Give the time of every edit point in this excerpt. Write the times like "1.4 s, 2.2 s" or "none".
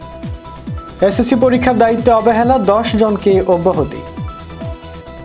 1.0 s, 4.0 s